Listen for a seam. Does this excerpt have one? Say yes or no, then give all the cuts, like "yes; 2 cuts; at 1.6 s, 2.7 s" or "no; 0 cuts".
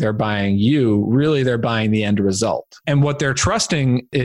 yes; 1 cut; at 2.8 s